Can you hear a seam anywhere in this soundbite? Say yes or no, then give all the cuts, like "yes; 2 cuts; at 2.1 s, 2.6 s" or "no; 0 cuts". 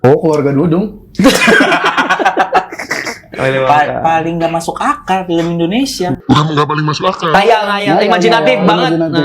yes; 2 cuts; at 3.3 s, 6.2 s